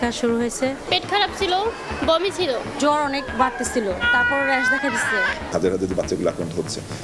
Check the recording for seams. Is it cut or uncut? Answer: cut